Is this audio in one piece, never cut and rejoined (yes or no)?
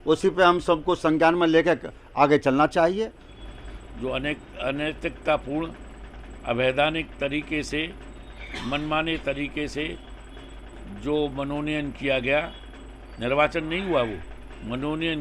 no